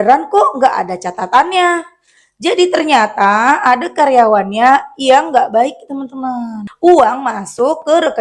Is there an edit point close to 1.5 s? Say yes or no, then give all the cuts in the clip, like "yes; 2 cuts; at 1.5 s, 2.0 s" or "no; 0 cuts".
no; 1 cut; at 6.6 s